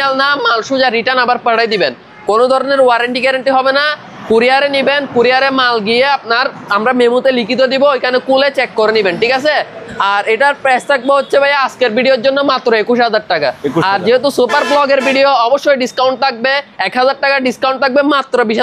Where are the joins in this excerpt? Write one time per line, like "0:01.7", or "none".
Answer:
none